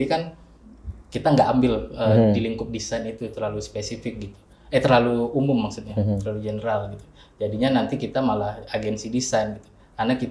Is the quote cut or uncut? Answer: uncut